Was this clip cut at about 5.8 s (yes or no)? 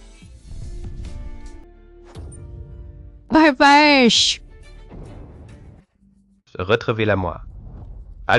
yes